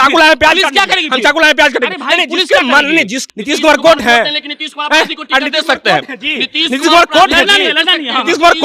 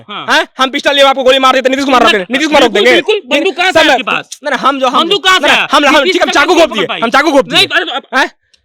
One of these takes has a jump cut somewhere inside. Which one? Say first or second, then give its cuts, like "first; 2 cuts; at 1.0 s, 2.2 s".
first; 1 cut; at 3.2 s